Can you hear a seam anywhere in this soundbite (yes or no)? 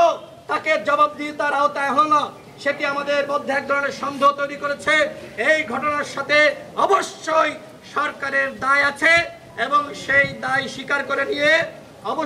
no